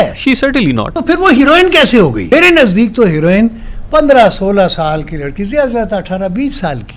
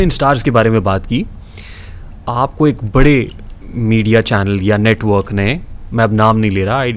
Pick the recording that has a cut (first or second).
first